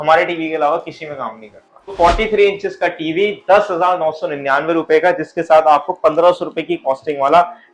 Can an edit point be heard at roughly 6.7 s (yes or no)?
no